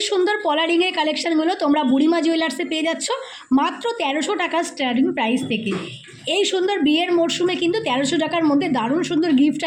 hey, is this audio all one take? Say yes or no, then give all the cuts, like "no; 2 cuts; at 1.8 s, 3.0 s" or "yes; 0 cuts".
yes; 0 cuts